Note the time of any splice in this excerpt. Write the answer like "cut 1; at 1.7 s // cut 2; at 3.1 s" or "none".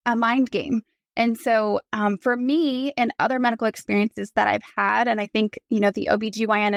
none